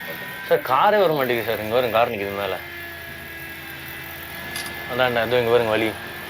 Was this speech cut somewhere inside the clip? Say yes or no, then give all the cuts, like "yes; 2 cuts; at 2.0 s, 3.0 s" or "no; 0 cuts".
no; 0 cuts